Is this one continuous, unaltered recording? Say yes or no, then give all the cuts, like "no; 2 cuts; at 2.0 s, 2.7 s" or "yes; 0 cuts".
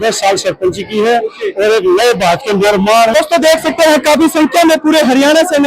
no; 1 cut; at 3.1 s